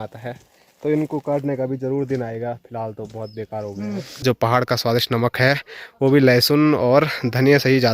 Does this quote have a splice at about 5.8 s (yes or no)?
no